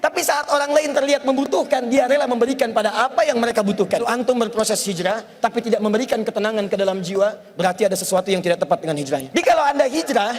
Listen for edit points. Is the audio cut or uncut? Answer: cut